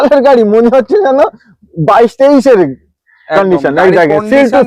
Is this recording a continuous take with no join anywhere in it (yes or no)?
yes